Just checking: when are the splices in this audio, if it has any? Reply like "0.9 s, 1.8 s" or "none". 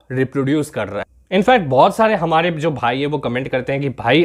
1.1 s